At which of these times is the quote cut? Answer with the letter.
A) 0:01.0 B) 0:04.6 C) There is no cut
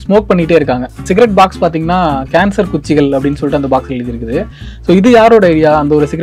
A